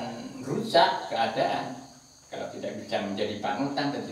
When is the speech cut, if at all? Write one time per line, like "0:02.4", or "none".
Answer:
none

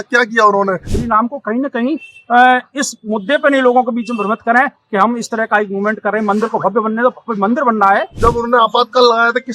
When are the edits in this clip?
0:00.9
0:08.1

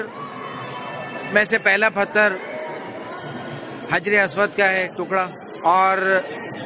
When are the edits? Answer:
0:05.4

